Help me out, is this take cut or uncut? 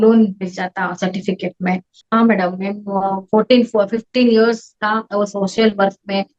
cut